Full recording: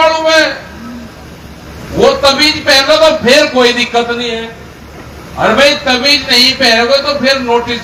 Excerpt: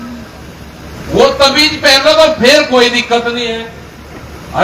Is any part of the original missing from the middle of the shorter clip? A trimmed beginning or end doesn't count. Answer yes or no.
no